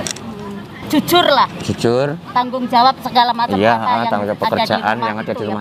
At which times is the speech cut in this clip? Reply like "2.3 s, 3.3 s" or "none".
none